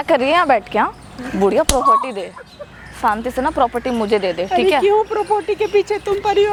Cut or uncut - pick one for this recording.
uncut